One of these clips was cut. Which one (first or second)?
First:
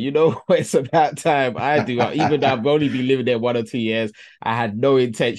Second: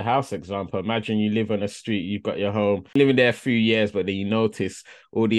second